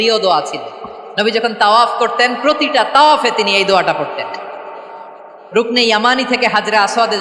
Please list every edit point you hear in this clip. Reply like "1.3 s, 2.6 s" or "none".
none